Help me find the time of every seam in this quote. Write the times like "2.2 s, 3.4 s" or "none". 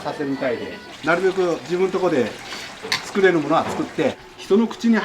0.9 s, 1.6 s, 4.2 s